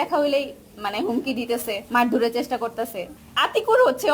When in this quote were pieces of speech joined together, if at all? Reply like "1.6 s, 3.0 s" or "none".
1.8 s, 3.1 s